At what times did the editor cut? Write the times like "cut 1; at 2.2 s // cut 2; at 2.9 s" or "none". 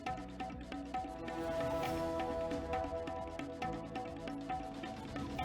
cut 1; at 1.9 s